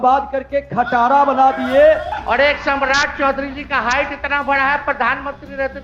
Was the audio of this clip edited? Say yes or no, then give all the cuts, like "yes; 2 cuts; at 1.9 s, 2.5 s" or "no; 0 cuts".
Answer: yes; 1 cut; at 2.1 s